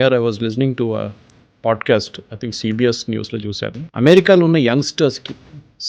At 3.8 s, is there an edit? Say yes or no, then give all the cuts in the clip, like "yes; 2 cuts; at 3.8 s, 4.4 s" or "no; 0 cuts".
yes; 1 cut; at 3.8 s